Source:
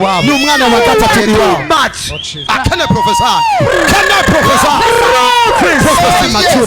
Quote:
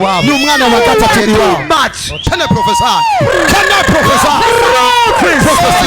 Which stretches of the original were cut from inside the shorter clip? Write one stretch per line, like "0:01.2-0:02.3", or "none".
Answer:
0:02.3-0:02.7